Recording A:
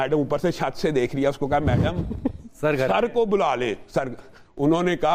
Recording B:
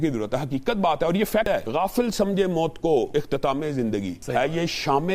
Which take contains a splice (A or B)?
B